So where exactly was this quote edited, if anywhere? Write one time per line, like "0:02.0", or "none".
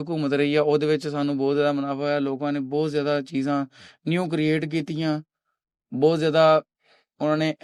none